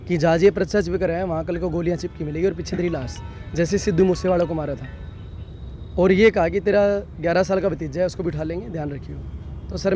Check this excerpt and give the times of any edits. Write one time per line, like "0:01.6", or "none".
none